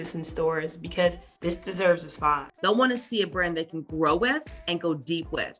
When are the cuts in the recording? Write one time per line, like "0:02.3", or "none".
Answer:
0:01.3
0:02.5

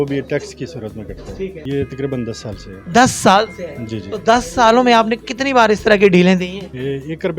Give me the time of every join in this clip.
0:01.6

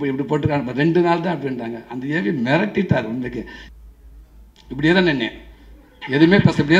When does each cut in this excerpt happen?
0:03.6

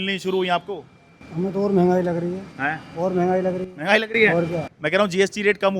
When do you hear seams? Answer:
0:04.7

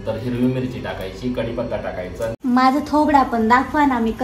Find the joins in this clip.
0:02.4

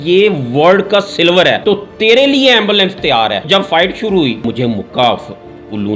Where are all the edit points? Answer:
0:01.6
0:03.4
0:04.4

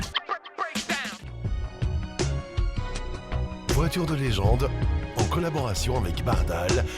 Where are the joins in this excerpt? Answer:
0:01.3

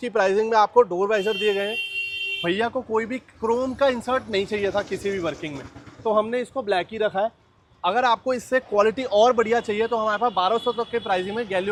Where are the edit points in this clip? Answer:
none

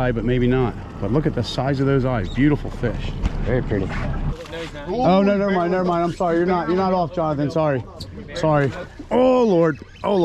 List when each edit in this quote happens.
0:04.4

